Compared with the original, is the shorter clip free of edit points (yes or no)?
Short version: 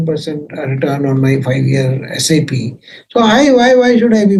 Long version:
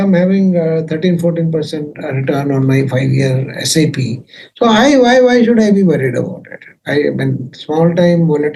yes